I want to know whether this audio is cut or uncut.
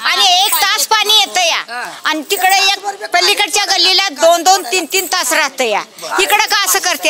uncut